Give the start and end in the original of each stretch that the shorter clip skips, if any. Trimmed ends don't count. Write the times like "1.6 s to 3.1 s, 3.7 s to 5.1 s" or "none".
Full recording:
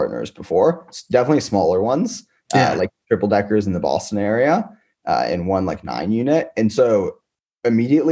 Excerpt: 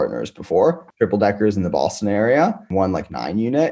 0.9 s to 3.0 s, 4.8 s to 5.4 s